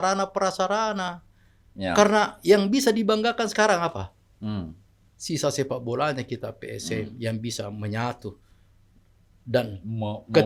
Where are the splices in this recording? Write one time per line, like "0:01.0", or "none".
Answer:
none